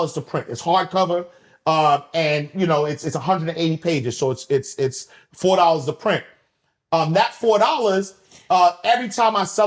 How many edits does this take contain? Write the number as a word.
zero